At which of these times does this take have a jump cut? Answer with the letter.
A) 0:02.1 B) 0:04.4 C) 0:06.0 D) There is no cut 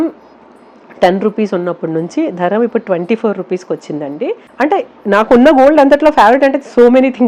B